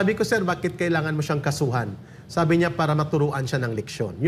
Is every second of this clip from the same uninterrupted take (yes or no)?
yes